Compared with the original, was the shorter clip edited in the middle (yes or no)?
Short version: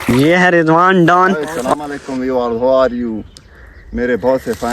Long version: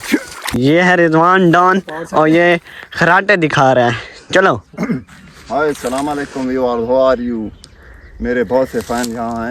yes